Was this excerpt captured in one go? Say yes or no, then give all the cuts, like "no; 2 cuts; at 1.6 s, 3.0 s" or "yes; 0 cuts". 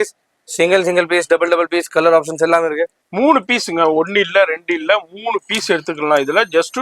no; 1 cut; at 3.0 s